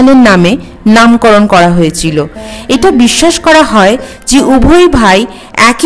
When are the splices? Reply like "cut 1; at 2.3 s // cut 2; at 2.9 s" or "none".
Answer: none